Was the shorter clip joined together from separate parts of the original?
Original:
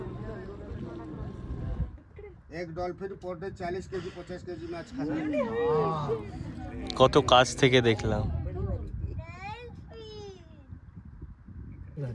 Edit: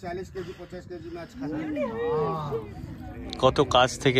no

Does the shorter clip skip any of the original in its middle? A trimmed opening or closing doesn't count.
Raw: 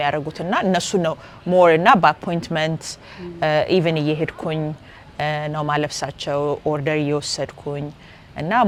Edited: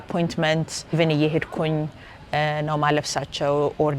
yes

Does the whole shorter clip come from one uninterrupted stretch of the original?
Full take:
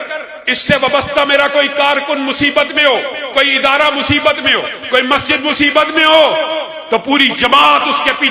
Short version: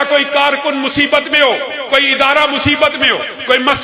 yes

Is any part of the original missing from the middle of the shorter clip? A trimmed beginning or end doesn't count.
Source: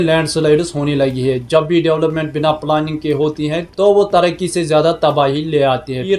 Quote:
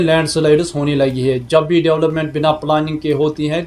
no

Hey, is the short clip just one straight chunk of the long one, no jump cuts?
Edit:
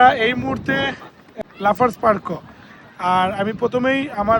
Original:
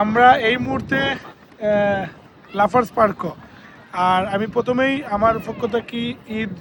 no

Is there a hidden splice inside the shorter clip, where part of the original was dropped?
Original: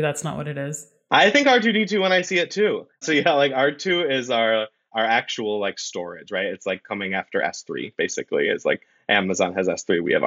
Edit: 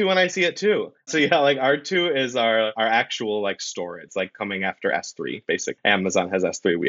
yes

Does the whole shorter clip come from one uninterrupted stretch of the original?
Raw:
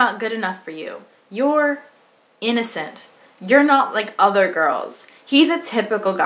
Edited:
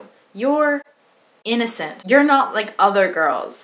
no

